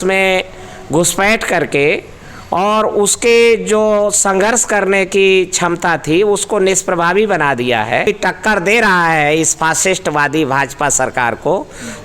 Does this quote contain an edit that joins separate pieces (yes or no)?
yes